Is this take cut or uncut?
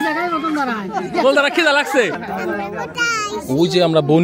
cut